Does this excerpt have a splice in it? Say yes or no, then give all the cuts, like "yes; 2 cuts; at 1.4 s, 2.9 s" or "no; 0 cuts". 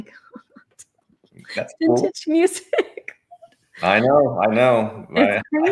no; 0 cuts